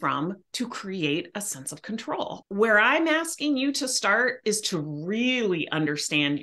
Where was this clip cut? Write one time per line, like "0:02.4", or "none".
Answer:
0:02.4